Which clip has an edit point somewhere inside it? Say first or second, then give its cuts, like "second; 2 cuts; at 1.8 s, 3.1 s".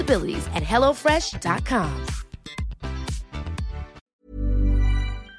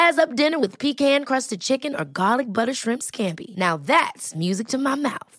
first; 1 cut; at 4.0 s